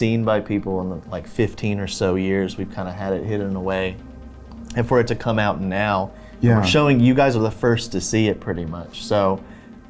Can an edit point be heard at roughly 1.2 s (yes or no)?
no